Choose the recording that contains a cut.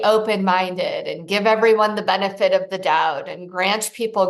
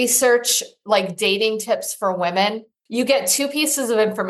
second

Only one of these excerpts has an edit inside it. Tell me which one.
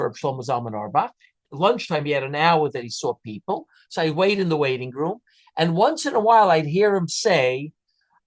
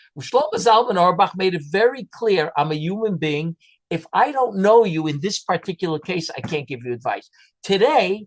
first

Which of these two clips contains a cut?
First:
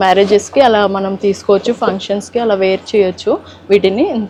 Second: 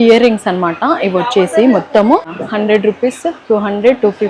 second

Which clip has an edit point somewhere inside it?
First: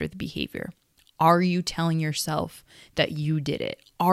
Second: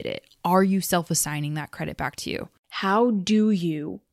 second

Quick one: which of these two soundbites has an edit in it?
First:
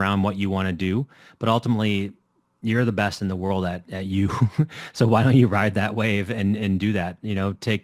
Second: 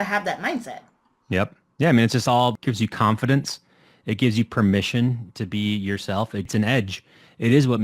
second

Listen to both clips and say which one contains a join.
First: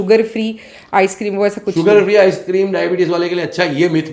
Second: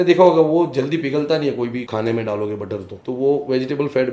second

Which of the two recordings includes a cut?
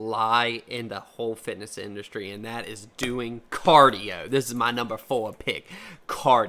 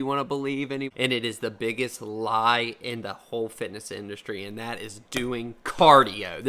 second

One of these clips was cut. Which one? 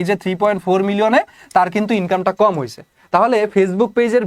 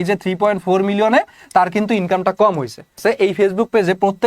second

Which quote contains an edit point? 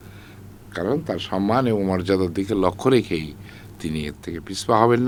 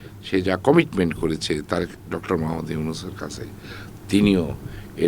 second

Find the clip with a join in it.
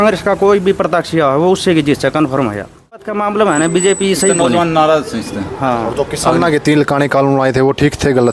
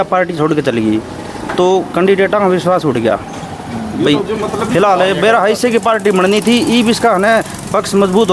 first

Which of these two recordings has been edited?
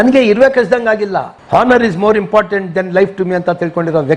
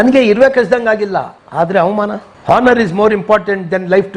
first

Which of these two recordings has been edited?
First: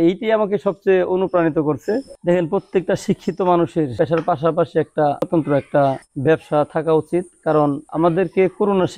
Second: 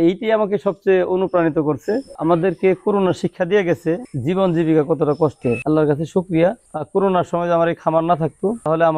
second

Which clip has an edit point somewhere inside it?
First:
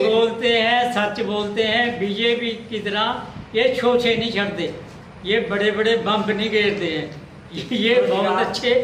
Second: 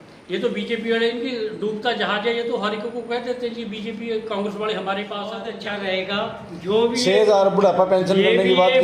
second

